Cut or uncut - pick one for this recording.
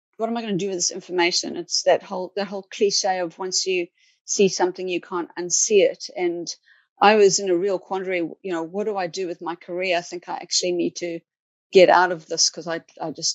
uncut